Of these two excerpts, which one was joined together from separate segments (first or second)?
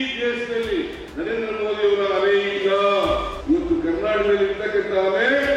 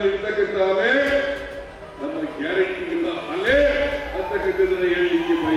first